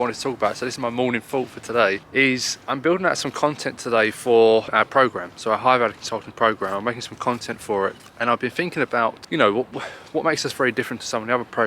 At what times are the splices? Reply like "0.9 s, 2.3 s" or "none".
2.0 s, 4.7 s, 8.1 s, 9.2 s